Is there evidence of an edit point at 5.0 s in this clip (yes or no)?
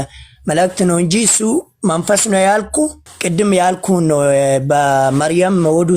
no